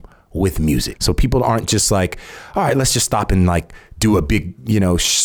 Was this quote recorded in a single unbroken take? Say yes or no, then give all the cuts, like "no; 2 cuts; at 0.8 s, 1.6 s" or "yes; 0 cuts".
no; 1 cut; at 0.9 s